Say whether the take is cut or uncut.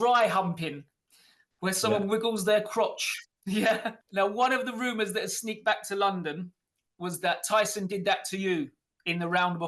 cut